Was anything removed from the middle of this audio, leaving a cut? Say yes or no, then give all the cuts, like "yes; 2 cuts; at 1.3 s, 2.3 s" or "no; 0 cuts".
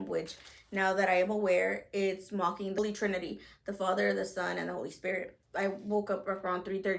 yes; 2 cuts; at 2.8 s, 5.4 s